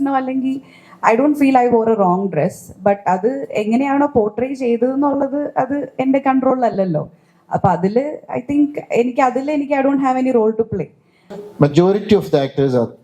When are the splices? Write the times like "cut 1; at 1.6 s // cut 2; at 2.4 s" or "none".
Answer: cut 1; at 11.4 s